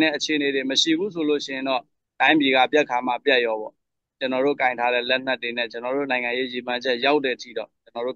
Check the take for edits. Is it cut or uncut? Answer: uncut